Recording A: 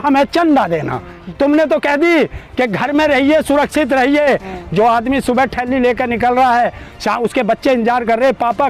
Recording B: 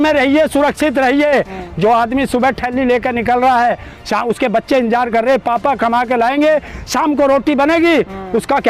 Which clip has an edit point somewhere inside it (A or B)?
A